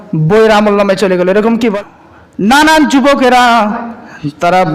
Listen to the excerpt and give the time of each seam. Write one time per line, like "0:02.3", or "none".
0:01.7